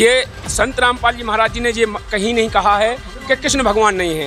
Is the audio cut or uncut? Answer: uncut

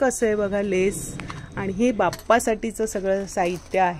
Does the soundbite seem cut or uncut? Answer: uncut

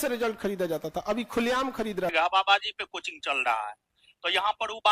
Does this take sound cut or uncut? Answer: cut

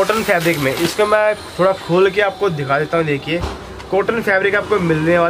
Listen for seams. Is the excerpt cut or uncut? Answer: uncut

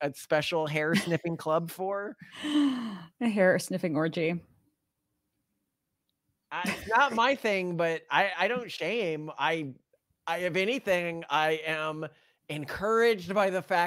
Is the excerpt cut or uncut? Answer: uncut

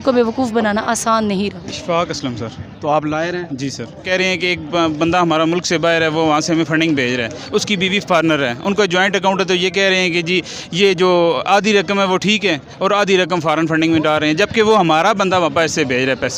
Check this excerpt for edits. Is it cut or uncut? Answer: cut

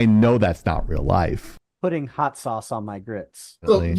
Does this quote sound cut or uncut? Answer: uncut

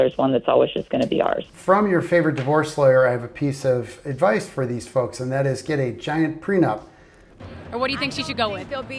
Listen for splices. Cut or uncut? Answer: cut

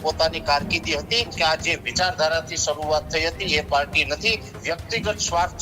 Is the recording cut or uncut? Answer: cut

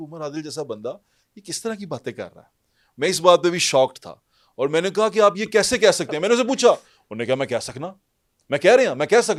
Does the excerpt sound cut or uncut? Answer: uncut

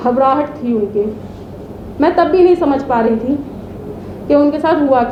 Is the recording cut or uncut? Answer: uncut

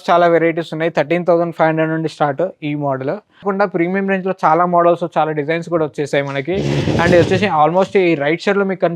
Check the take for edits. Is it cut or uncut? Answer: cut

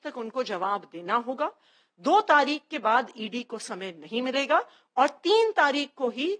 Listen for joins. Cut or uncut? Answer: uncut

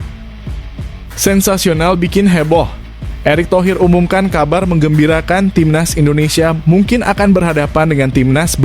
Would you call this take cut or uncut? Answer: cut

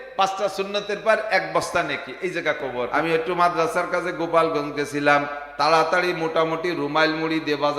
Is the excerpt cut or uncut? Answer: cut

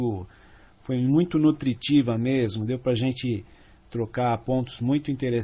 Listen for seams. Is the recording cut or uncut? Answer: cut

